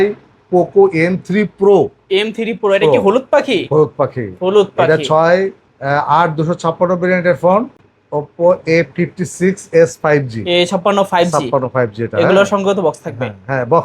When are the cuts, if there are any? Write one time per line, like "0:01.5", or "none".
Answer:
0:07.8